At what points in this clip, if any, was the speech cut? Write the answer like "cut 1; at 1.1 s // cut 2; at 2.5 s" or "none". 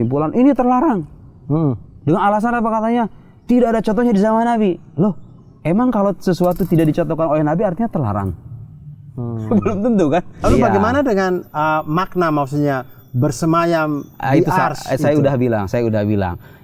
cut 1; at 10.4 s